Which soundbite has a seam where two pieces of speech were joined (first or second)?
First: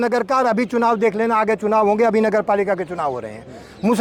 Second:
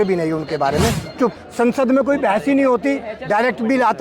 second